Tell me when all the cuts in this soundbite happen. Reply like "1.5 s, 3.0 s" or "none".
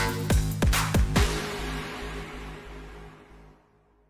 1.1 s